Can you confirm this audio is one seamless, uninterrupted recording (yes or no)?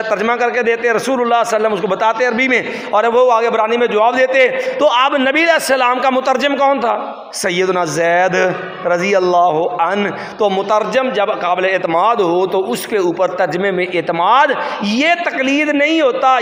yes